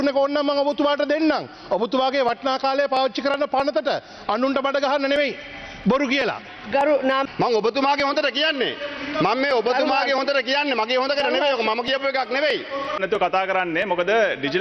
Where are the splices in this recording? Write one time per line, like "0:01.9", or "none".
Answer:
0:07.2
0:13.0